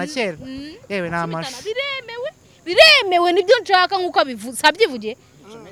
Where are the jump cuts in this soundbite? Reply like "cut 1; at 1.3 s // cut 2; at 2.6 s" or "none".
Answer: none

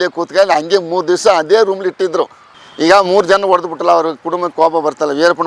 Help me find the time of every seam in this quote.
cut 1; at 2.5 s

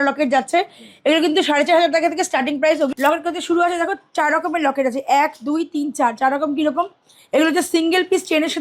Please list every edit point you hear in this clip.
cut 1; at 2.9 s

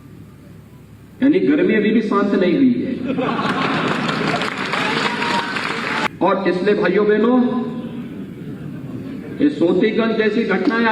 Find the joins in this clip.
cut 1; at 6.0 s

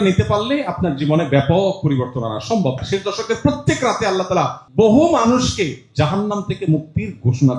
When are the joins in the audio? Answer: cut 1; at 2.8 s // cut 2; at 4.6 s

